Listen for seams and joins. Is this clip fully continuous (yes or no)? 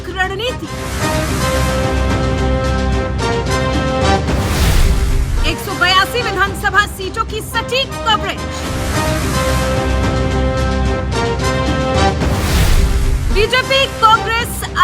yes